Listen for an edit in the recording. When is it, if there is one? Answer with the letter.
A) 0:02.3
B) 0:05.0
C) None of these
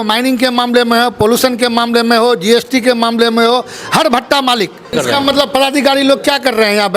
B